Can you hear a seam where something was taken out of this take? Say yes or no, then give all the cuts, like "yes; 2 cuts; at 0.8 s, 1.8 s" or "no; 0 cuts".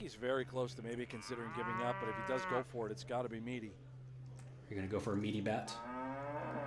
yes; 1 cut; at 5.8 s